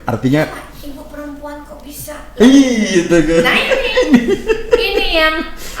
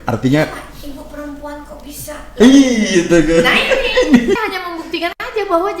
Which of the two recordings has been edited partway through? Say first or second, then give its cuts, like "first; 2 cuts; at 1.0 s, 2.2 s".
second; 1 cut; at 4.4 s